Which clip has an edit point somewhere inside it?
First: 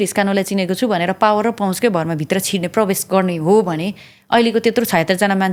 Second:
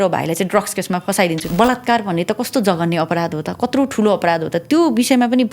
second; 1 cut; at 1.4 s

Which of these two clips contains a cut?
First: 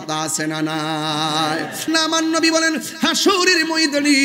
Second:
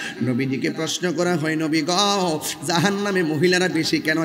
first; 1 cut; at 1.9 s

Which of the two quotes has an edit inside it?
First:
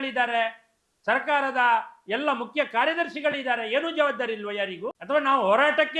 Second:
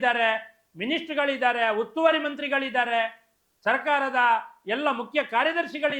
first; 1 cut; at 4.9 s

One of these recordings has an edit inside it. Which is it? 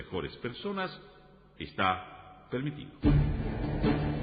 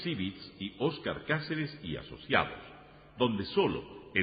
first; 1 cut; at 3.0 s

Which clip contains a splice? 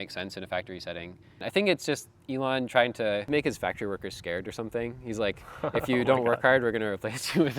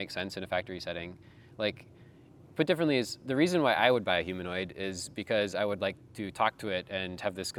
first; 2 cuts; at 1.3 s, 3.3 s

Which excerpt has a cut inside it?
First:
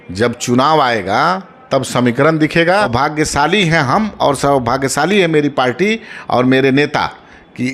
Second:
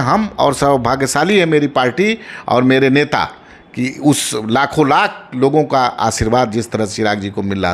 first; 1 cut; at 2.9 s

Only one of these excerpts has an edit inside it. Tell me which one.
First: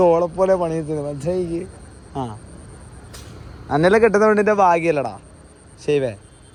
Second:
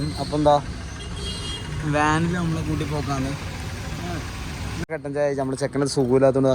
second; 1 cut; at 4.9 s

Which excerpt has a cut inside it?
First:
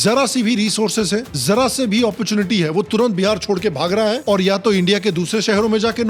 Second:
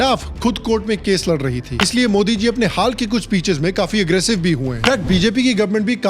second; 2 cuts; at 1.7 s, 4.8 s

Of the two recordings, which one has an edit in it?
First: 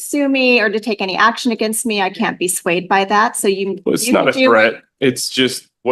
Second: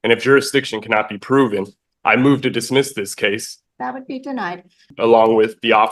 second; 2 cuts; at 3.5 s, 4.9 s

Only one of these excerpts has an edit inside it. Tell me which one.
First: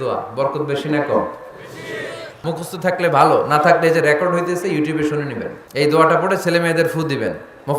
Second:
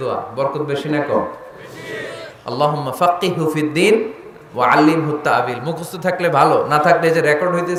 first; 2 cuts; at 2.4 s, 5.6 s

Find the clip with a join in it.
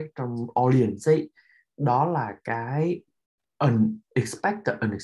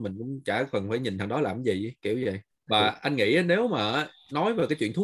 second; 1 cut; at 2.5 s

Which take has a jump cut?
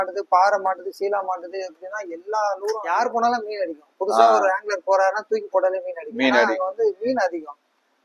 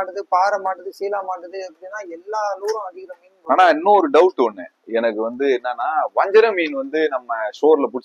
first; 1 cut; at 2.8 s

